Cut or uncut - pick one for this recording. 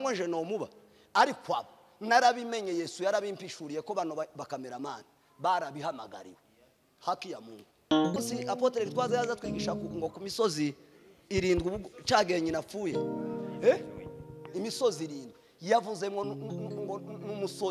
cut